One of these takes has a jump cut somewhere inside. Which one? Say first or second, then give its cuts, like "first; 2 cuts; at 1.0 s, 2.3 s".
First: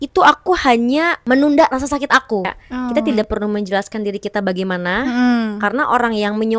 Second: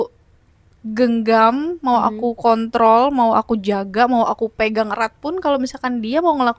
first; 2 cuts; at 1.2 s, 2.9 s